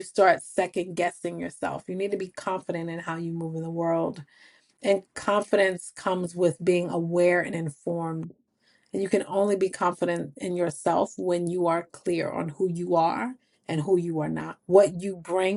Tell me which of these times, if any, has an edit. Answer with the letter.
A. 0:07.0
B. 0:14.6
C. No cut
C